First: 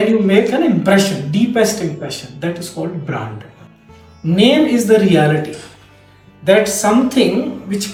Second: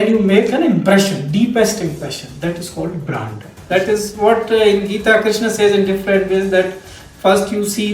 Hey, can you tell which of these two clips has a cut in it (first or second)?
second